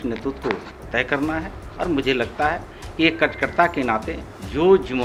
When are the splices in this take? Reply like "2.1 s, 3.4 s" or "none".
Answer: none